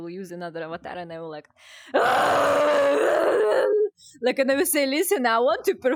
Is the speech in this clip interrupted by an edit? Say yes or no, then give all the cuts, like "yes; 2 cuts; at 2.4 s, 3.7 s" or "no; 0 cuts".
no; 0 cuts